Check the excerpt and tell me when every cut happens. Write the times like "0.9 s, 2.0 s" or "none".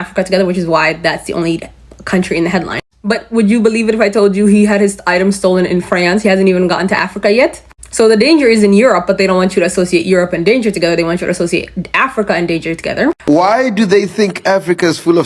13.2 s